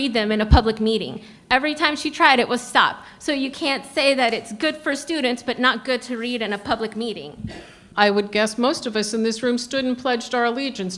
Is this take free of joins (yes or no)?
no